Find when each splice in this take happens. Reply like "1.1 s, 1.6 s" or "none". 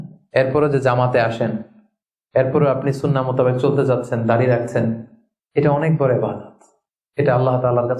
none